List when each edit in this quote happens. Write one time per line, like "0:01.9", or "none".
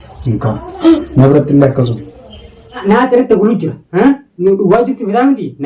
0:02.8